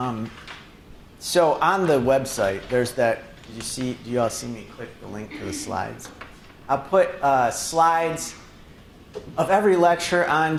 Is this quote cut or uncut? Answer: uncut